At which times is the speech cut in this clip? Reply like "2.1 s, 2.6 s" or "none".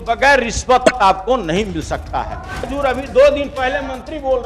2.7 s